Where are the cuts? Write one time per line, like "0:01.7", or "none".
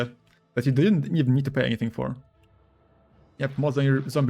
none